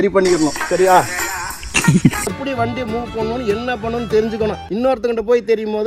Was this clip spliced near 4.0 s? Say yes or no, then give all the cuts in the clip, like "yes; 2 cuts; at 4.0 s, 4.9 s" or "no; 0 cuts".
no; 1 cut; at 2.4 s